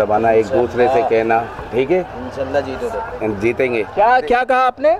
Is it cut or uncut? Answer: uncut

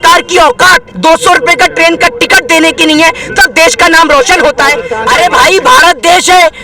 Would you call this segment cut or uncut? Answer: cut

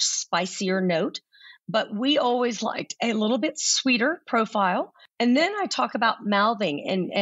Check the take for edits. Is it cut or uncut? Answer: cut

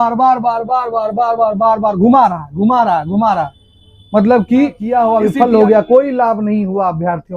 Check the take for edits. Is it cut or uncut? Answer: cut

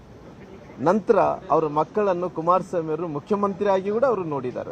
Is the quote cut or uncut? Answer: uncut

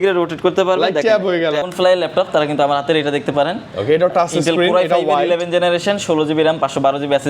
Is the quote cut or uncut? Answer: cut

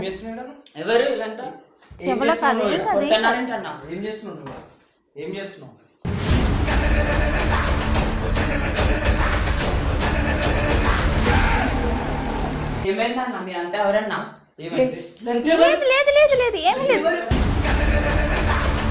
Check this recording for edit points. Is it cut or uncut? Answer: cut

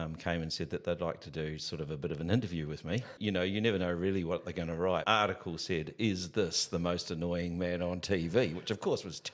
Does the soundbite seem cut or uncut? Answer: cut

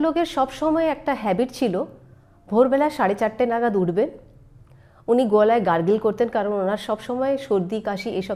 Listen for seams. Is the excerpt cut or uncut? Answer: uncut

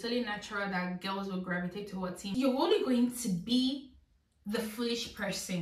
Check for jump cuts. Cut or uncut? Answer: cut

